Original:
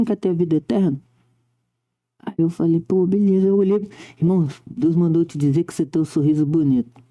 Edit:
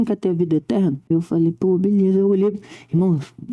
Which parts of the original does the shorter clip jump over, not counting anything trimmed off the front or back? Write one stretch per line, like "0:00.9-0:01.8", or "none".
0:01.0-0:02.3